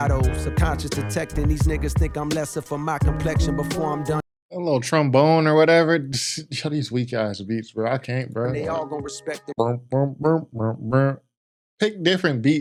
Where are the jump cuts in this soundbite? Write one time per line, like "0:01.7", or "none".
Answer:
none